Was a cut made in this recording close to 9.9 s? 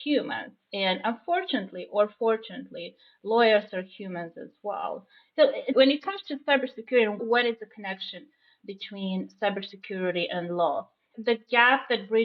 no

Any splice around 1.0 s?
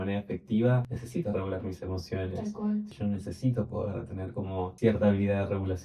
yes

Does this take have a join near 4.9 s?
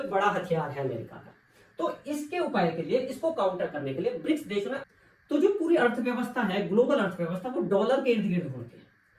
yes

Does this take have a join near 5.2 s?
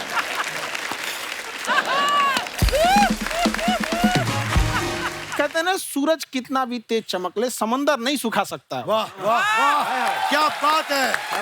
yes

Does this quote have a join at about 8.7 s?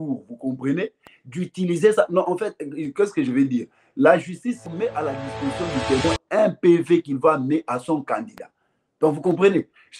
no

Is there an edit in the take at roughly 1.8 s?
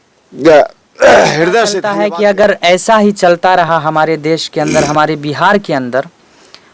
yes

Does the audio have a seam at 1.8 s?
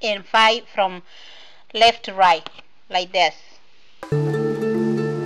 no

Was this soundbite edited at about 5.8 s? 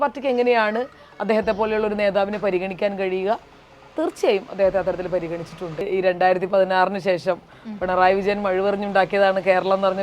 yes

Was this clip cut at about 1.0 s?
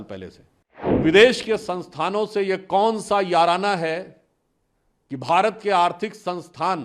yes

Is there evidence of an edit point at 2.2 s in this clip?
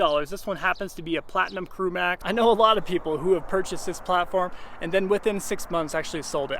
yes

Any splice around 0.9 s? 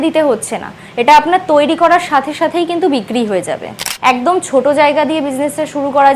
no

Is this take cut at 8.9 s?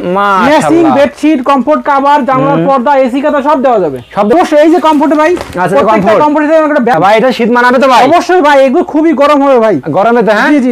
no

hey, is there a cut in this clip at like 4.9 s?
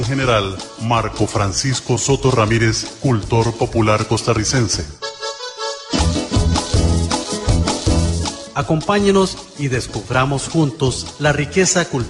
no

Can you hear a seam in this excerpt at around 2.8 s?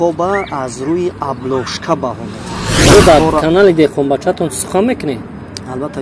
yes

